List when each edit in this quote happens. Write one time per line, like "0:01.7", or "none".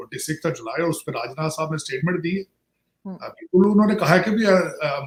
none

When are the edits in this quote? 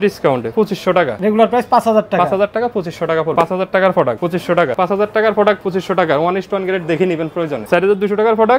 0:01.0
0:03.3
0:04.7
0:05.6
0:07.6

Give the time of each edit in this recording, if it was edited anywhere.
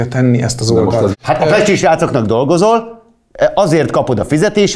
0:01.1

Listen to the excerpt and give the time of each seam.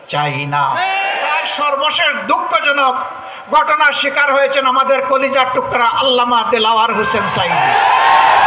0:01.3

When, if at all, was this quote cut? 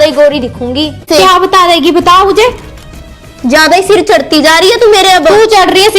0:01.1

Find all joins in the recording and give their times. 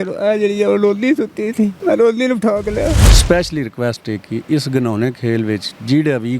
0:01.8
0:03.1

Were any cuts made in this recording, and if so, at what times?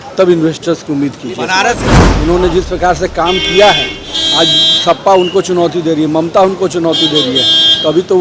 0:01.9

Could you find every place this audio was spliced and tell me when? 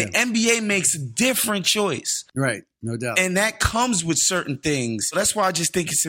0:05.1

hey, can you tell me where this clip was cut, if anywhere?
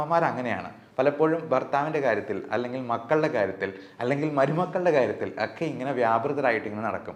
none

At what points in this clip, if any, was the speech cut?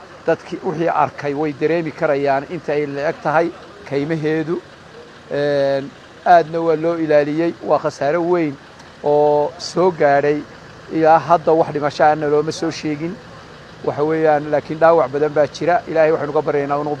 none

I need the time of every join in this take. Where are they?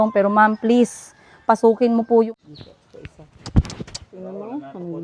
0:02.3

